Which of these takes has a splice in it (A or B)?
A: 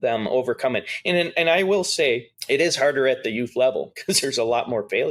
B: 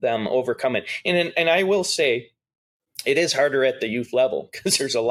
A